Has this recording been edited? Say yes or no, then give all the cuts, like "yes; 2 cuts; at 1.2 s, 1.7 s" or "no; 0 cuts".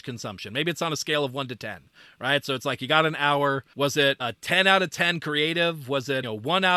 yes; 1 cut; at 3.7 s